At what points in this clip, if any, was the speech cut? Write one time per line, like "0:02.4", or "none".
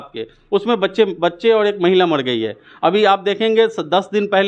none